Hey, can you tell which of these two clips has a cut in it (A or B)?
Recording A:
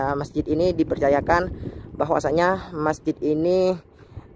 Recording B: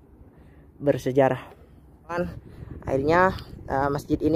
B